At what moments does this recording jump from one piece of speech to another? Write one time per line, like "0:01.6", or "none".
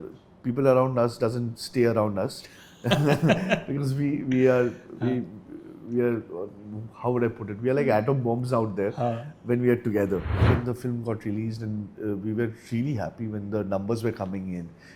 0:10.4